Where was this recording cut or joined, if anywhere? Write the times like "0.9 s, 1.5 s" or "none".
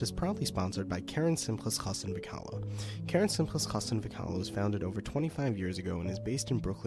none